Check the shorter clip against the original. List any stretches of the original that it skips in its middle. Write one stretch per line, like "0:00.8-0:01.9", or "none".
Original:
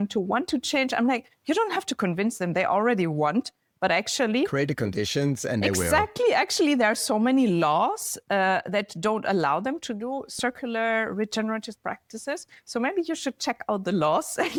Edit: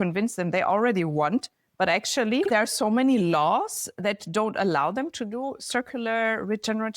0:04.5-0:06.8
0:08.2-0:08.6